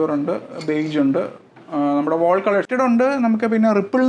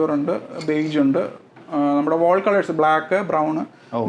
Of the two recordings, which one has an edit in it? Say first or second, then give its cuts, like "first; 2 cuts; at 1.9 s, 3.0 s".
first; 1 cut; at 2.7 s